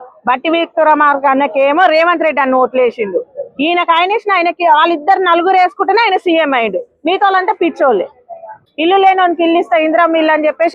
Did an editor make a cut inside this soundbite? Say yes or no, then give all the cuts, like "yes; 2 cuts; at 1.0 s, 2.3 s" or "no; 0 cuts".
yes; 1 cut; at 8.7 s